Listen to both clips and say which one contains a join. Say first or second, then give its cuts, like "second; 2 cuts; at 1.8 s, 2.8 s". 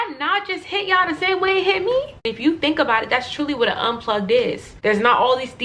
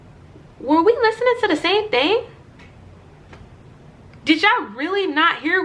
first; 2 cuts; at 2.3 s, 4.7 s